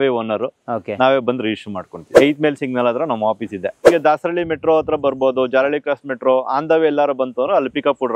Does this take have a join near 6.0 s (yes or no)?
no